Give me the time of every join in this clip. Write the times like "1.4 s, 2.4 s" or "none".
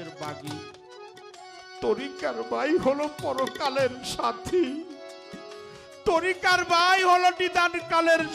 none